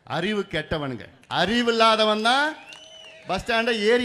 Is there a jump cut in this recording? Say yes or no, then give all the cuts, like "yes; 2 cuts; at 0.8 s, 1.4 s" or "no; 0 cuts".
yes; 1 cut; at 1.1 s